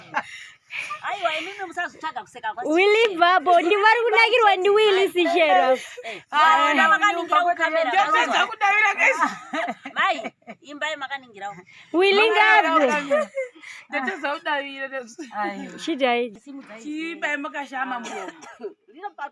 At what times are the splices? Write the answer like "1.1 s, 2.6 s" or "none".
16.3 s